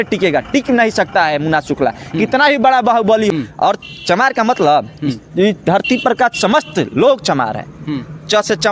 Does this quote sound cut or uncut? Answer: cut